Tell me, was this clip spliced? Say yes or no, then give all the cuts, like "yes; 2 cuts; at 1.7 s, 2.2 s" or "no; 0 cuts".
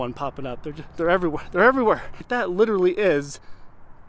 yes; 1 cut; at 2.2 s